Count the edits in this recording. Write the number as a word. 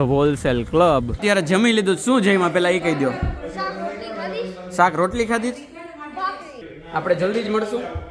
two